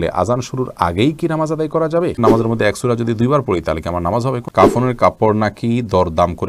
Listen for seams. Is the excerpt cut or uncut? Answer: cut